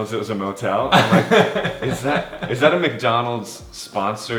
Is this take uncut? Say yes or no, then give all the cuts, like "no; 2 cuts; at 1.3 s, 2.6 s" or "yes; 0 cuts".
yes; 0 cuts